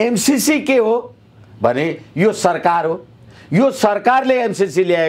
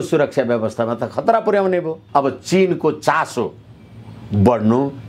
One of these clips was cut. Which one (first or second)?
second